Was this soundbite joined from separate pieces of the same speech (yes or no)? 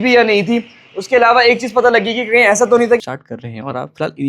yes